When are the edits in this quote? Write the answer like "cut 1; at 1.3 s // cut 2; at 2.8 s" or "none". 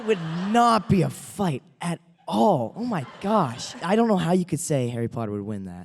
cut 1; at 3.8 s